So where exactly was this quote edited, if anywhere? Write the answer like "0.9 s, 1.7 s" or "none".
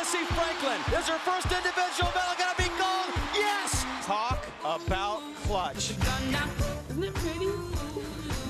5.2 s